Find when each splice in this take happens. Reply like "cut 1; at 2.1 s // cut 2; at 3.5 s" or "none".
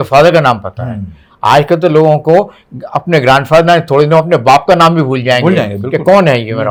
none